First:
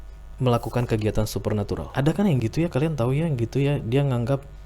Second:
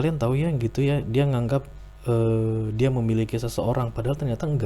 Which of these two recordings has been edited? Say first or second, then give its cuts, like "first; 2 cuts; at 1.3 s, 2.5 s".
first; 1 cut; at 1.9 s